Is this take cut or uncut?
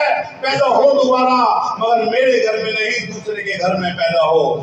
uncut